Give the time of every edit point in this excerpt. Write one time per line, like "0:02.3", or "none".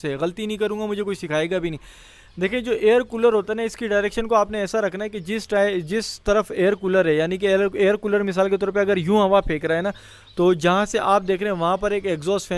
none